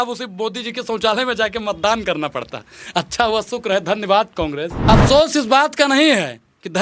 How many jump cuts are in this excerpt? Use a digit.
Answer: 1